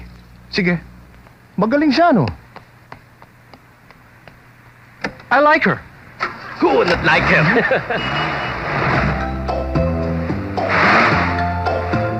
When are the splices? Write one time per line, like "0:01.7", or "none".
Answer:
none